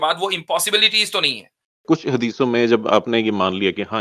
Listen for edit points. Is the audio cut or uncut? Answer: cut